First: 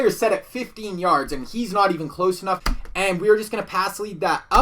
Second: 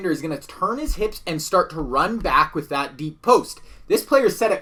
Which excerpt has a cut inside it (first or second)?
first